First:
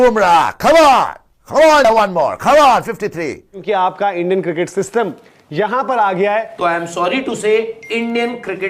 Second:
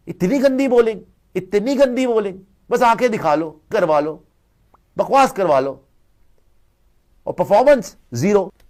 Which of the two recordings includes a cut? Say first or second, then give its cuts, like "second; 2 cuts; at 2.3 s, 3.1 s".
first; 2 cuts; at 3.6 s, 6.5 s